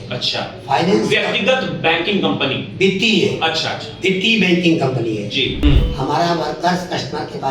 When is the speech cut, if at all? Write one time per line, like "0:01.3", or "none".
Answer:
0:05.6